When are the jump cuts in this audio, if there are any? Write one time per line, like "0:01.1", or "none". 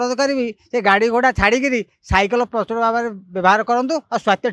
none